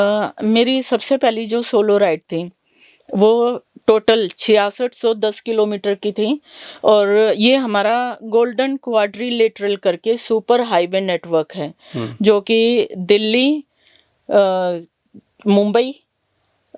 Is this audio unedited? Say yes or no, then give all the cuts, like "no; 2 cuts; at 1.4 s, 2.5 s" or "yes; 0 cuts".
yes; 0 cuts